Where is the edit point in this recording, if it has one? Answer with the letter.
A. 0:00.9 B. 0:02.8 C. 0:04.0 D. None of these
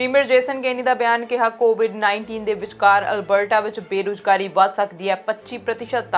D